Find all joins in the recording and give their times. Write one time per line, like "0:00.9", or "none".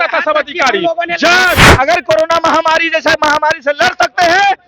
0:01.6